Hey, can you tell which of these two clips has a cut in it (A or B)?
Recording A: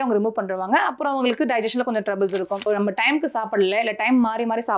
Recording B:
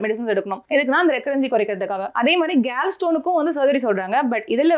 A